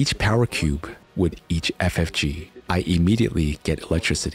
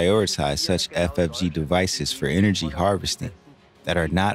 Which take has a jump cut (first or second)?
first